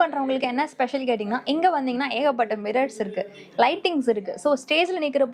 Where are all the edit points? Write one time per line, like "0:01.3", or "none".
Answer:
none